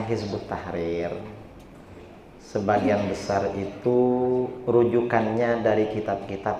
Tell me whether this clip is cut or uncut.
uncut